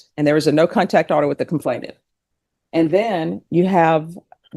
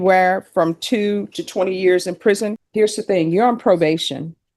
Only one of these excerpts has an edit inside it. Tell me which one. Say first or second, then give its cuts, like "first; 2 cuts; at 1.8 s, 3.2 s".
second; 1 cut; at 2.6 s